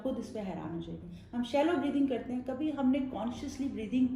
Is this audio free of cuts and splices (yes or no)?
no